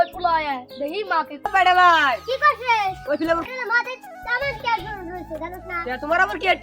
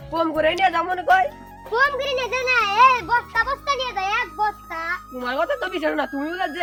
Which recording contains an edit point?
first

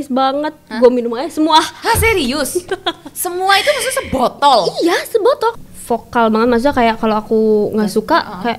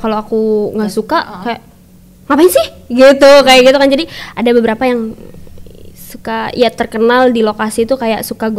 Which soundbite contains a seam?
first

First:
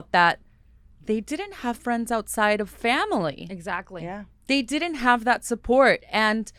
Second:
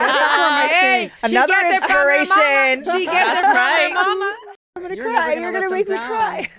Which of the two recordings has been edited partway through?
second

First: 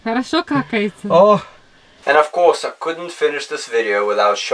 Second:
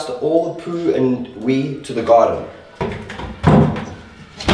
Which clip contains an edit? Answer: first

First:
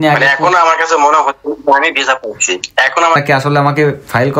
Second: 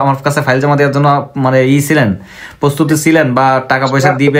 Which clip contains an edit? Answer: first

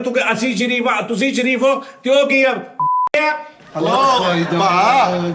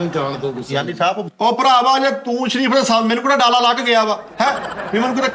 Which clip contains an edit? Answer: second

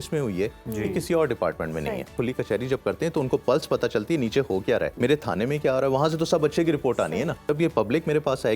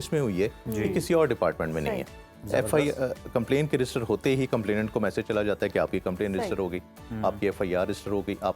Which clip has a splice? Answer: first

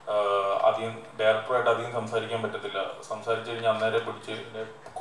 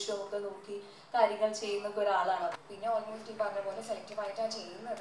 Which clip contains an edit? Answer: second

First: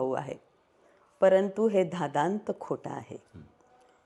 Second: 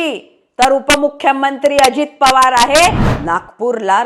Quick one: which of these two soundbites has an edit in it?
second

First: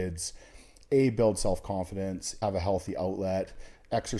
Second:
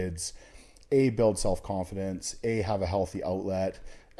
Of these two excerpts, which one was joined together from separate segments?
first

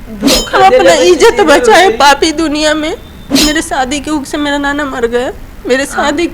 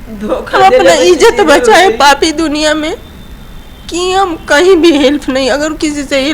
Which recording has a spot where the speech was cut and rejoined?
first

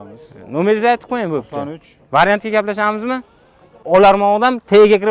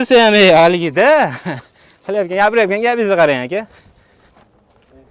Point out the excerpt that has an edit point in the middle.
first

